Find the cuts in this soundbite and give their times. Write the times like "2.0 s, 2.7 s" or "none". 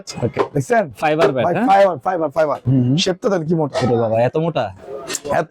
2.6 s